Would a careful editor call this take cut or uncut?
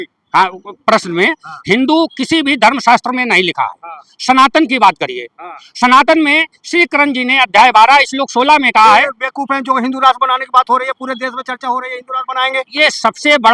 uncut